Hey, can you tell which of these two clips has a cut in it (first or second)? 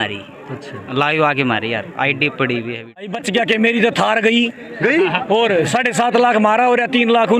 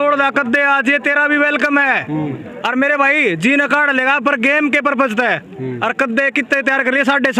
first